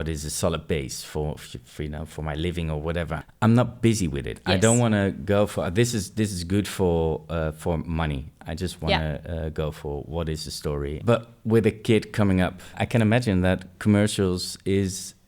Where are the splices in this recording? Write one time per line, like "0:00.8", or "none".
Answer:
0:03.2
0:11.0
0:12.8